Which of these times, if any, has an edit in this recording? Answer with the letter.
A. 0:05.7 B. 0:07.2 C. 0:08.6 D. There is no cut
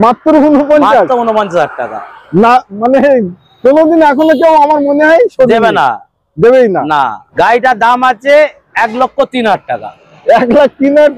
B